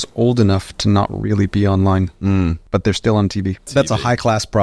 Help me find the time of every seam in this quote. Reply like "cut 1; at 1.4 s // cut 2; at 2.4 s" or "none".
cut 1; at 2.6 s // cut 2; at 3.7 s